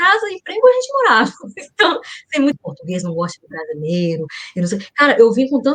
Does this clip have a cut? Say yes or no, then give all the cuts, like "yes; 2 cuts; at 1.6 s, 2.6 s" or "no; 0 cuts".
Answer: yes; 1 cut; at 2.5 s